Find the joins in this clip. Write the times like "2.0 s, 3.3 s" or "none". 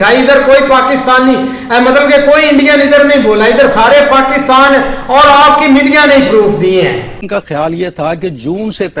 none